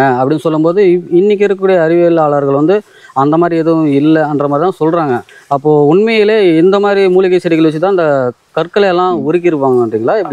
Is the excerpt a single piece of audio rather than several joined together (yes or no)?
yes